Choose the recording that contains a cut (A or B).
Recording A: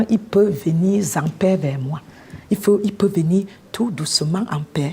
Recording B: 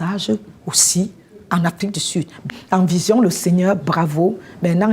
B